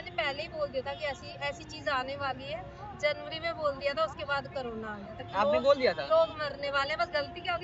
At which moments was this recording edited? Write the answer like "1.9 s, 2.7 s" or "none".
none